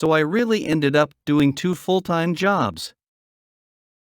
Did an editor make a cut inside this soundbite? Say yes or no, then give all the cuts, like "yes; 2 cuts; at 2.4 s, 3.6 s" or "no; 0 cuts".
yes; 1 cut; at 1.4 s